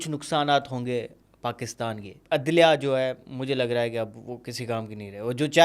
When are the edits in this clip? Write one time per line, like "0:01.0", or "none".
0:02.1